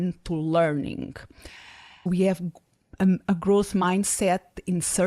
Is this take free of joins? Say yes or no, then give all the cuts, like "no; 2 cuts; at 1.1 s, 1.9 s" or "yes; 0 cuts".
no; 1 cut; at 2.1 s